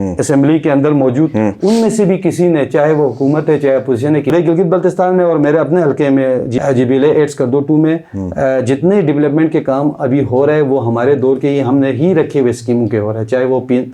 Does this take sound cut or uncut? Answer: cut